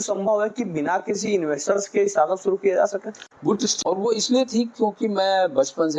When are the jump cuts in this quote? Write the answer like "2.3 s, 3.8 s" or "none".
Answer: 3.7 s